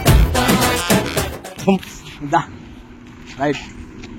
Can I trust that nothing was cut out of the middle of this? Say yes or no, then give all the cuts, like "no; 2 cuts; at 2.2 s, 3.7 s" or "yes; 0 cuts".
yes; 0 cuts